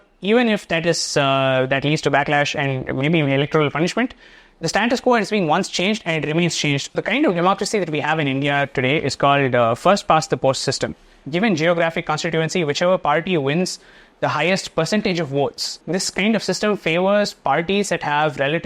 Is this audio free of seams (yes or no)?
no